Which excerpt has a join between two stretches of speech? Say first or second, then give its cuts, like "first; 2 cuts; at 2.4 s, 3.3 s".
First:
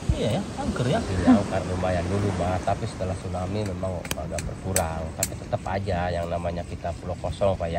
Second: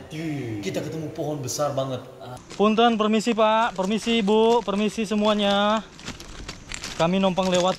second; 1 cut; at 2.4 s